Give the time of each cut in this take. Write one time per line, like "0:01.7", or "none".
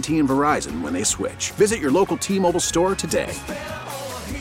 none